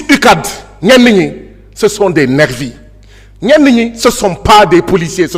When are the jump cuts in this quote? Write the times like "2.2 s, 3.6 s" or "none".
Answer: none